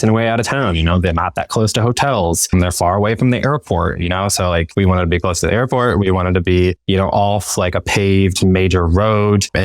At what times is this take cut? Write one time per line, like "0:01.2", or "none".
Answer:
0:04.7